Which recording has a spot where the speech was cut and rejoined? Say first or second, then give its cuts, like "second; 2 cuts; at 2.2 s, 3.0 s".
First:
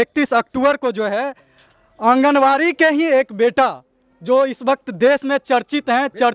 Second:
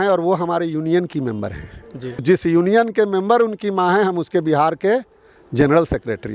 second; 1 cut; at 2.2 s